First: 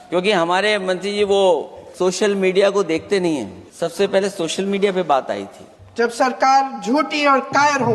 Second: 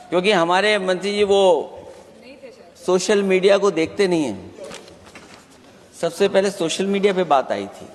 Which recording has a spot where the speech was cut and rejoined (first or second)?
first